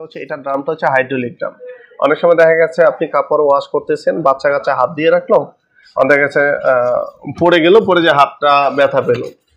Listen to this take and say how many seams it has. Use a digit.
0